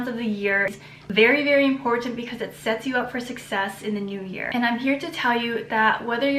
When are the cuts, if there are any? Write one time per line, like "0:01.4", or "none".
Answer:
none